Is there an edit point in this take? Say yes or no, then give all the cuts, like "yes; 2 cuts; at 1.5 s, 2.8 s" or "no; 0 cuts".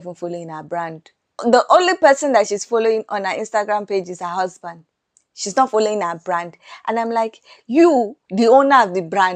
no; 0 cuts